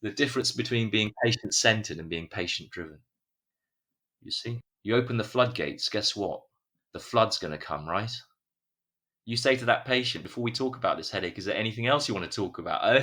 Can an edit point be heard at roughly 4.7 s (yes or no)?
yes